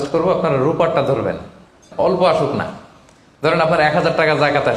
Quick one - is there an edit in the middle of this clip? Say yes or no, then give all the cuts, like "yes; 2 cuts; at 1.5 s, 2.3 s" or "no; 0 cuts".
yes; 1 cut; at 1.9 s